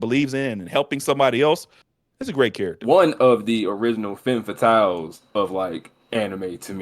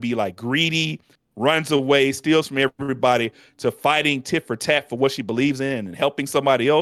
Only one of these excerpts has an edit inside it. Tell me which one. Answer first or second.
first